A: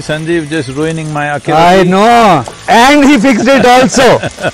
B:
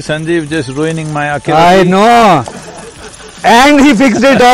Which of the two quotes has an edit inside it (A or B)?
A